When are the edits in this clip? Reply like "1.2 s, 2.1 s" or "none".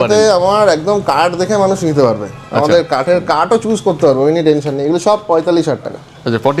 none